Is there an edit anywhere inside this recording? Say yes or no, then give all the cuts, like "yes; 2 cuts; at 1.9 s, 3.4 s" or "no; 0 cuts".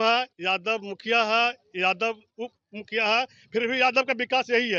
no; 0 cuts